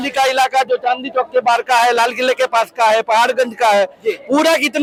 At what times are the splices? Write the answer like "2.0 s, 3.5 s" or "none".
none